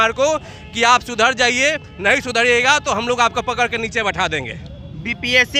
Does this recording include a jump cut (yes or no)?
no